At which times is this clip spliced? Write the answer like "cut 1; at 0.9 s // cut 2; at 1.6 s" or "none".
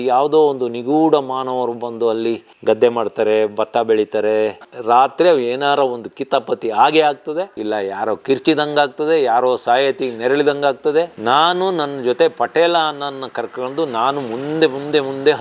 cut 1; at 4.7 s